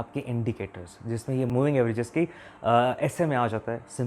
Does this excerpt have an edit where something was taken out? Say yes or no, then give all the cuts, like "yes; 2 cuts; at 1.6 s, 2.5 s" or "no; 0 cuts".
yes; 1 cut; at 1.5 s